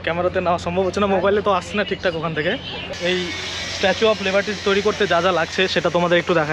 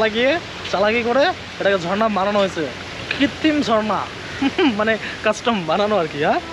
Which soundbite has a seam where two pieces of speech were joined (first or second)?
first